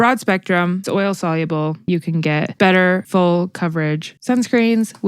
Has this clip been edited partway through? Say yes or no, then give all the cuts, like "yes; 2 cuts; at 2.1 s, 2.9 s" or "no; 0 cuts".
yes; 3 cuts; at 0.8 s, 2.0 s, 3.0 s